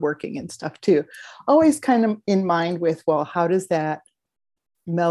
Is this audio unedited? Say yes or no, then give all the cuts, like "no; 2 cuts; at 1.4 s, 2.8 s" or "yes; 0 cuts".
yes; 0 cuts